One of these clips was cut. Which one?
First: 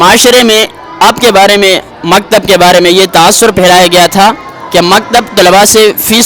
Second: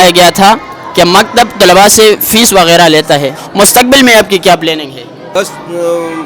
second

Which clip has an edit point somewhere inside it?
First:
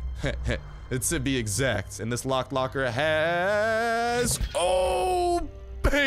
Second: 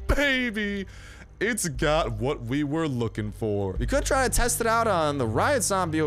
second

